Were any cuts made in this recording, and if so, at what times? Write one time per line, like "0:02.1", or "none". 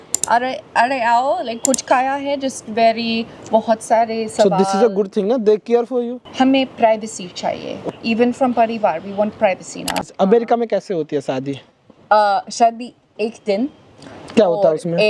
0:06.2
0:07.9
0:09.9

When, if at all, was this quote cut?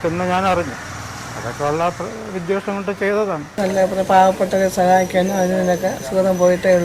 0:03.5

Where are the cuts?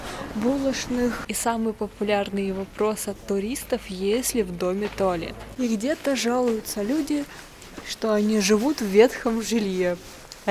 0:01.3
0:05.4

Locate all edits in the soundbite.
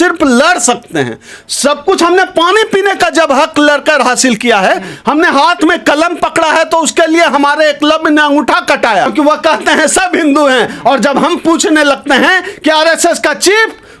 0:09.1

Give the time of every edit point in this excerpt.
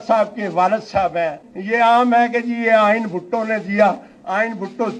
0:01.5

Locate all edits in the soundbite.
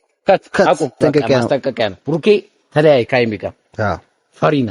0:01.0

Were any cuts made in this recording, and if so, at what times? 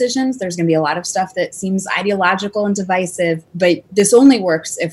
0:03.5

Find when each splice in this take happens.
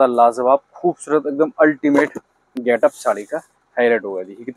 none

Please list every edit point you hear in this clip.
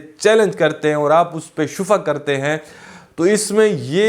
0:03.0

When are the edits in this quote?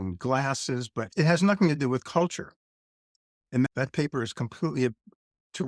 0:01.1
0:03.7

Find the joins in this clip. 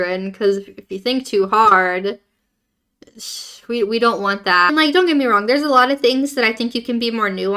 0:04.7

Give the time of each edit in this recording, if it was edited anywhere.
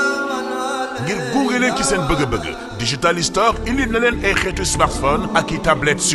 none

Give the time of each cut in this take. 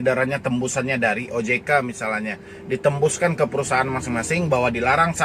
none

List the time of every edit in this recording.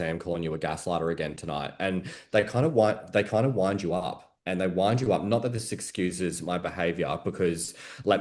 none

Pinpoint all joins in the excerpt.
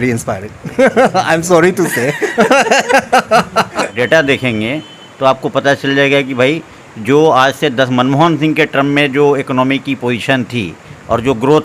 0:03.8

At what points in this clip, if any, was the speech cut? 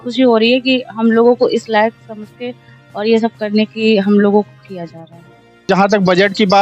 0:05.7

